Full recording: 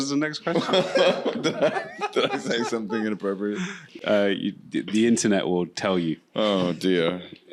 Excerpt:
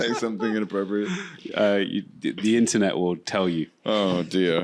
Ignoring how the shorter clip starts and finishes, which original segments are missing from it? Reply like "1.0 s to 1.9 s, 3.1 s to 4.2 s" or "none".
none